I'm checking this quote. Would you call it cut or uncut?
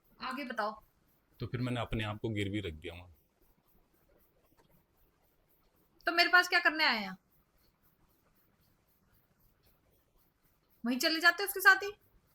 uncut